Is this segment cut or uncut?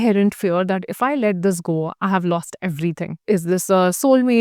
cut